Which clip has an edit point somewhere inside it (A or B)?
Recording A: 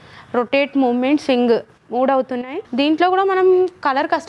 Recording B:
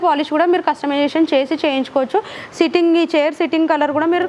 A